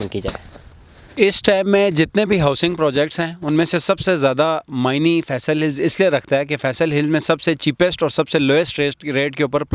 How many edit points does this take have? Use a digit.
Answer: 0